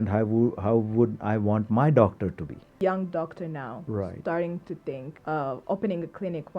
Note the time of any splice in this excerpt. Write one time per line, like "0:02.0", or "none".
0:02.7
0:05.1